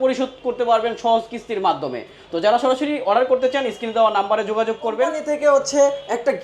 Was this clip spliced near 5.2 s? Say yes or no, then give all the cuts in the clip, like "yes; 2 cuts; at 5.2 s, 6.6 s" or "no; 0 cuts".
yes; 1 cut; at 5.2 s